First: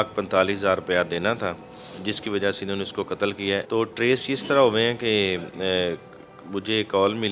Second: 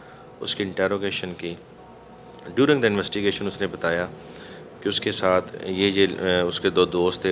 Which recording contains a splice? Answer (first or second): first